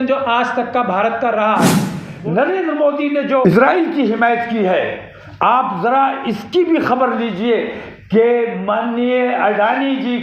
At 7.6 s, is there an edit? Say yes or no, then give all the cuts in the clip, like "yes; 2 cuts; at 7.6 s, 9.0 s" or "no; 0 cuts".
no; 2 cuts; at 2.0 s, 3.4 s